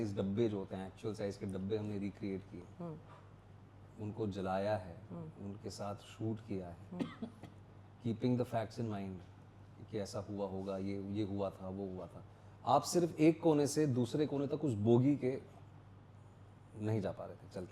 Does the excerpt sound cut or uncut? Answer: uncut